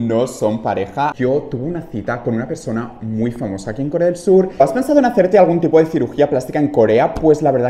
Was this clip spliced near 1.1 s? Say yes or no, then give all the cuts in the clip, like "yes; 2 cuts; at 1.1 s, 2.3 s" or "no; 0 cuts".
yes; 2 cuts; at 1.1 s, 4.6 s